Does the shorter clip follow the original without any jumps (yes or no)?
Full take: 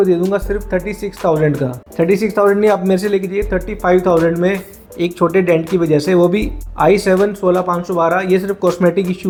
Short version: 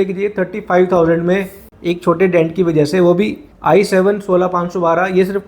yes